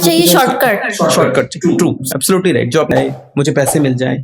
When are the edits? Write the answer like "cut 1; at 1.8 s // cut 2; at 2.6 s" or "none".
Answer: cut 1; at 2.9 s